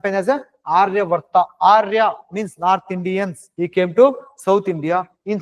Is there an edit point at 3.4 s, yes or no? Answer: yes